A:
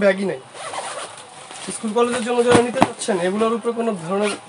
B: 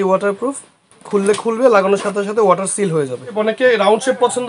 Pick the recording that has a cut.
B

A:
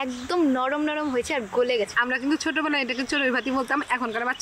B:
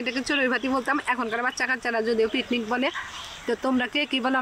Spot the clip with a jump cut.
A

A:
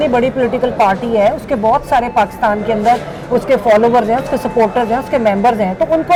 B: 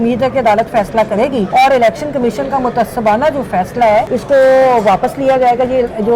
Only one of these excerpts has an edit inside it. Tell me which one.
B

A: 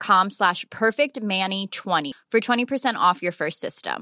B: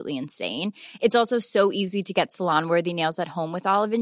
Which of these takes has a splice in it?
A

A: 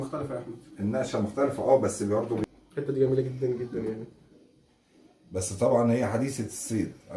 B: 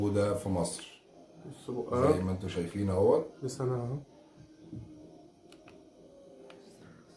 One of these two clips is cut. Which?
A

